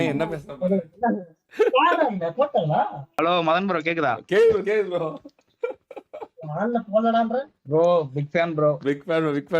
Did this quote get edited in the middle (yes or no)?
yes